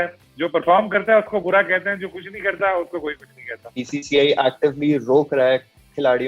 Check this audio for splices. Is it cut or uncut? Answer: cut